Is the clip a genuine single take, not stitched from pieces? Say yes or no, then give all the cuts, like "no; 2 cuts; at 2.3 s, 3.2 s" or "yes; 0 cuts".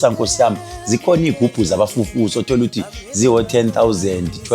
no; 1 cut; at 1.4 s